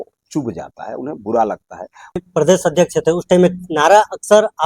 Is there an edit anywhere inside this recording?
yes; 1 cut; at 2.2 s

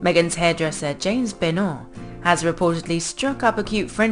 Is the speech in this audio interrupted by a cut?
yes; 1 cut; at 3.1 s

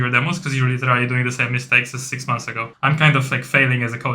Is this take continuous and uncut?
no; 1 cut; at 2.7 s

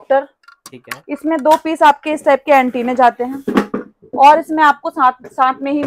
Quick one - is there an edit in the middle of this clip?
no; 0 cuts

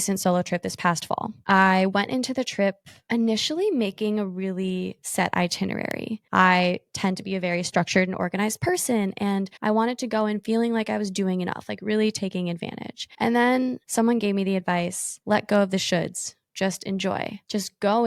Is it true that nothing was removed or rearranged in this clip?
yes; 0 cuts

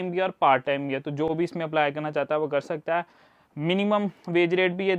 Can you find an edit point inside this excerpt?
no; 0 cuts

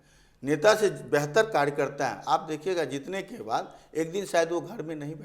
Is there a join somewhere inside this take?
no; 0 cuts

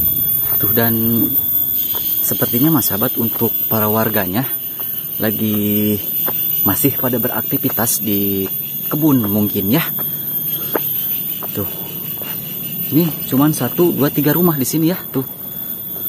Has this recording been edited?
no; 0 cuts

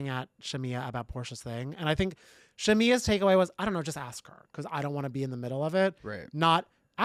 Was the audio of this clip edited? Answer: no; 0 cuts

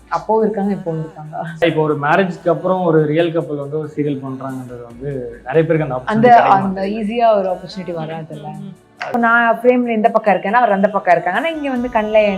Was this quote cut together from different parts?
yes; 2 cuts; at 1.6 s, 9.1 s

